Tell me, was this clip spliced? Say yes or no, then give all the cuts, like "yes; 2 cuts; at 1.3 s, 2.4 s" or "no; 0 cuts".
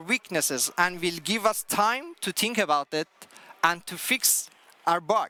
no; 0 cuts